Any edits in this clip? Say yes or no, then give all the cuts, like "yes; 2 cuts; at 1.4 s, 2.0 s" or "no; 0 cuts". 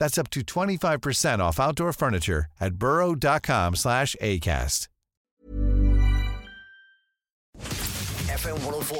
yes; 1 cut; at 7.5 s